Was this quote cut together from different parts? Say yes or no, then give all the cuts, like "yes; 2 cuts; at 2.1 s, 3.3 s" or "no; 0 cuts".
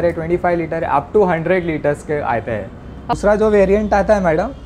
yes; 1 cut; at 3.1 s